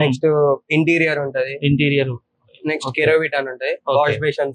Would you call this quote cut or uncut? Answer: uncut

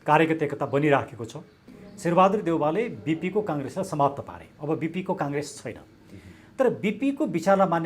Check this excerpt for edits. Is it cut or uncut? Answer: cut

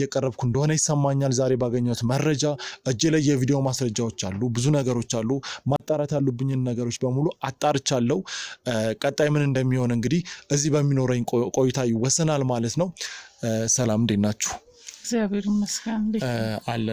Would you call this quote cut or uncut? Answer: uncut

